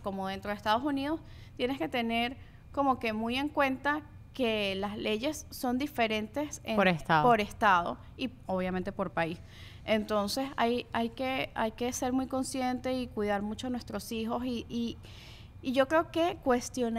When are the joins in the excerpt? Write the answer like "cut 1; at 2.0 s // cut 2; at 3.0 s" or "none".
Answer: none

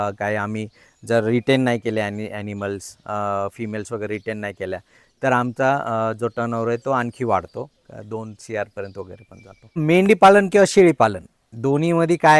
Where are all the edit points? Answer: cut 1; at 9.8 s

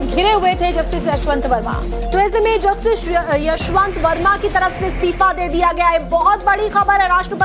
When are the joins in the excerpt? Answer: cut 1; at 4.9 s

